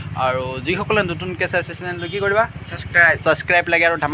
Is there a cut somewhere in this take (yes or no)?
no